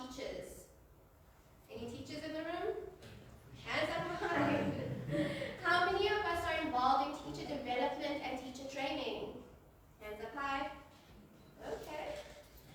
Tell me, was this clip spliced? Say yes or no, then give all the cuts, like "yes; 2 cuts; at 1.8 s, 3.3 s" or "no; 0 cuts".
no; 0 cuts